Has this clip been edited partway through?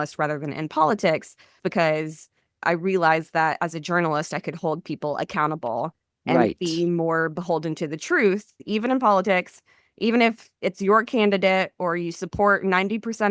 yes; 2 cuts; at 1.6 s, 8.6 s

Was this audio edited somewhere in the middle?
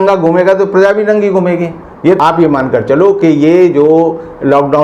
yes; 1 cut; at 2.2 s

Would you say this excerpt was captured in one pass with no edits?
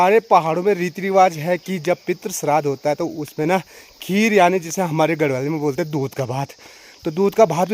yes; 0 cuts

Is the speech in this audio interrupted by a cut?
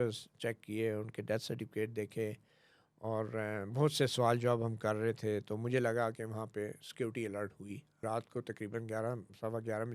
yes; 1 cut; at 8.0 s

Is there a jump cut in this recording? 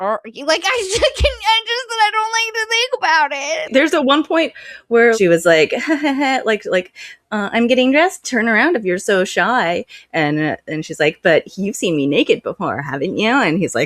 yes; 2 cuts; at 3.7 s, 5.2 s

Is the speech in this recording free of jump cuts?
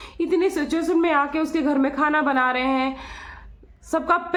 yes; 0 cuts

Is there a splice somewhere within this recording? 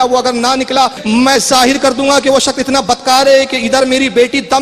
yes; 1 cut; at 1.0 s

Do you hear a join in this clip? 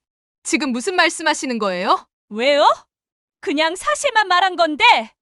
yes; 1 cut; at 2.1 s

